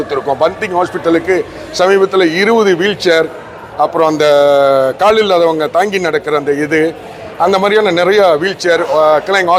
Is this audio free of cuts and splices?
yes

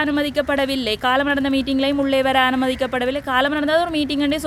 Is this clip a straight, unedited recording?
yes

